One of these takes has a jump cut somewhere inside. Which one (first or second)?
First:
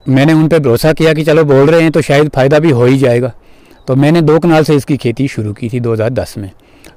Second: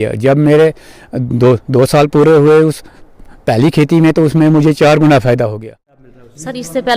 second